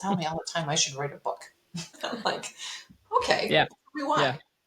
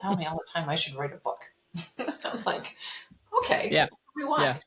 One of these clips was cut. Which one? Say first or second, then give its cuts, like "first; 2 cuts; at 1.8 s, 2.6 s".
first; 1 cut; at 1.9 s